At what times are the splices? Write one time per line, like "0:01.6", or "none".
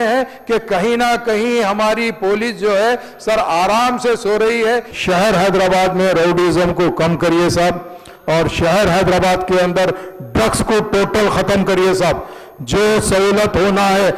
0:04.9